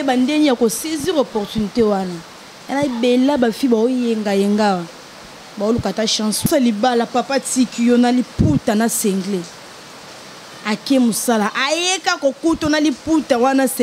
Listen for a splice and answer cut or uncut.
cut